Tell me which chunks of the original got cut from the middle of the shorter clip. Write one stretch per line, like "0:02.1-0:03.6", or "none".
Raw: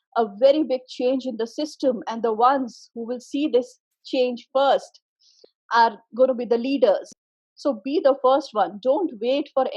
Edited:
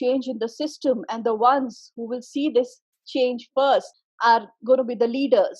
0:05.0-0:05.5